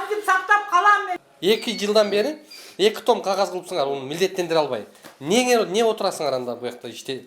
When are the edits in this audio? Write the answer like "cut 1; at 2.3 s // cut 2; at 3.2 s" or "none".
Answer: cut 1; at 1.1 s